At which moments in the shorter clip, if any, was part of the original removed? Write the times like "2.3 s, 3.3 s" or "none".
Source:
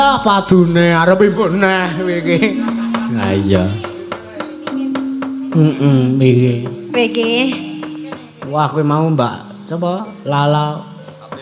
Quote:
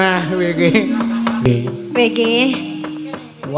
1.5 s